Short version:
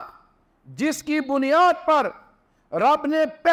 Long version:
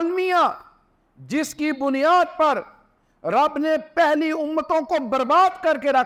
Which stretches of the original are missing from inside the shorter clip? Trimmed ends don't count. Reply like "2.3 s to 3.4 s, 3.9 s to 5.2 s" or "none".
none